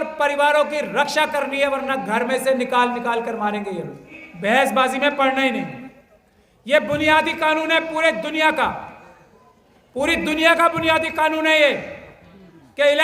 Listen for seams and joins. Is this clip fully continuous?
no; 1 cut; at 4.2 s

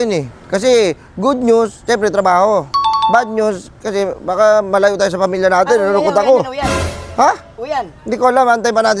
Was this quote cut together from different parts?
no; 0 cuts

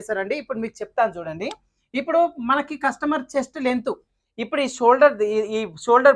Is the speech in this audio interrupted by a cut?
no; 0 cuts

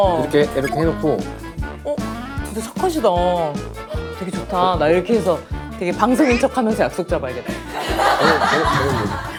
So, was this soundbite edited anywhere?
no; 0 cuts

